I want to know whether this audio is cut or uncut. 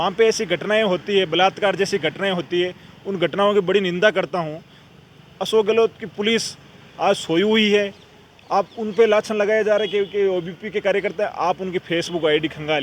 uncut